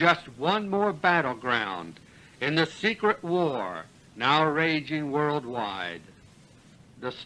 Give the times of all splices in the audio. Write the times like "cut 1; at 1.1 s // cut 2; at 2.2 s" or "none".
cut 1; at 1.9 s